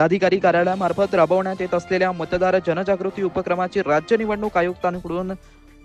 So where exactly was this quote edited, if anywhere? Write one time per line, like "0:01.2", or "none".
none